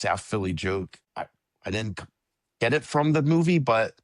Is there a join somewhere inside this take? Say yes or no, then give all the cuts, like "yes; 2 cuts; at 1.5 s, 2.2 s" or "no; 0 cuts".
yes; 1 cut; at 1.0 s